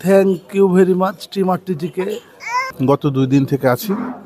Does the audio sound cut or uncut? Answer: cut